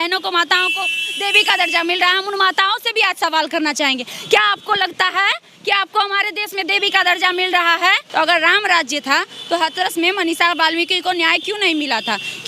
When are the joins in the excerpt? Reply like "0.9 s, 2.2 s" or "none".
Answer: 8.0 s

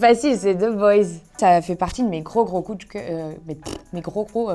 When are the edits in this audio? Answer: 1.3 s

